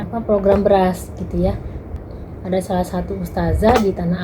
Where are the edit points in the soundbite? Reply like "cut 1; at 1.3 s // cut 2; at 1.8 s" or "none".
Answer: cut 1; at 2.0 s